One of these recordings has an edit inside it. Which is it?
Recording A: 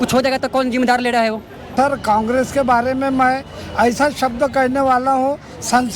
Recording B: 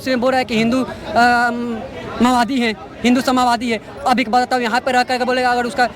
A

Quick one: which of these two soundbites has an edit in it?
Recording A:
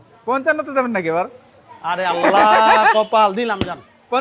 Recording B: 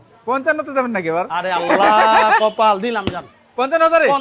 B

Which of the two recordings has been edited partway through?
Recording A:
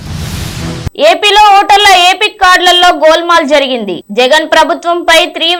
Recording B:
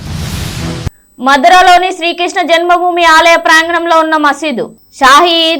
B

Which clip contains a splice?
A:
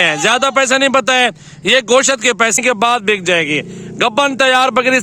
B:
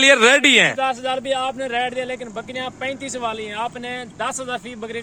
A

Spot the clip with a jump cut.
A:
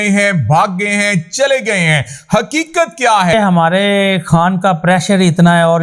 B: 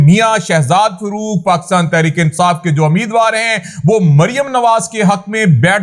A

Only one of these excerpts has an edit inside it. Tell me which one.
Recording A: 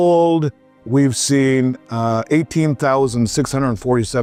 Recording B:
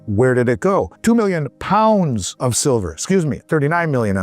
B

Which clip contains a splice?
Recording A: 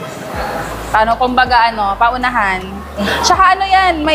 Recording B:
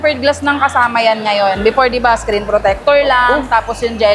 A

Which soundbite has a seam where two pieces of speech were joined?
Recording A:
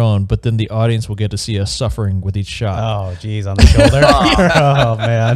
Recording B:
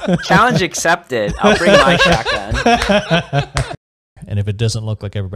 B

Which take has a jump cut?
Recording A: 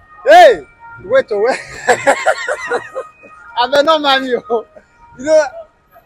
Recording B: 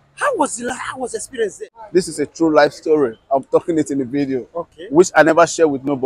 B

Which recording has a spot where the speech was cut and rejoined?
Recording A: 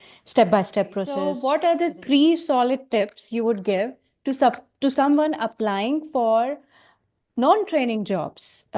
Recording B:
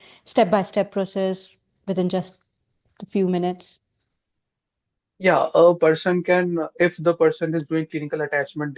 A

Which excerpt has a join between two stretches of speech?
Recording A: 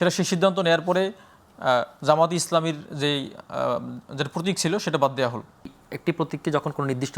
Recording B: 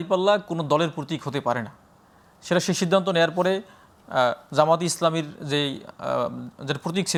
A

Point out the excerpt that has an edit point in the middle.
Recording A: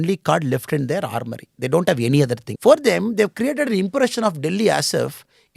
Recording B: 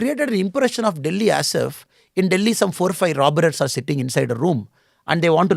A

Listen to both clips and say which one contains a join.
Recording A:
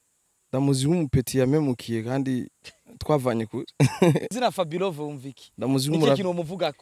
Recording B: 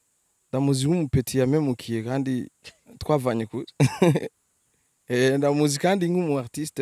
A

